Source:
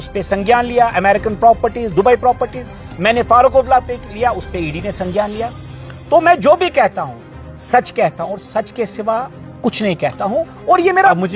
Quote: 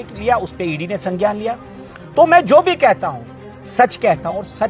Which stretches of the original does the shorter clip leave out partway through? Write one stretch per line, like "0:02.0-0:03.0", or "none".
none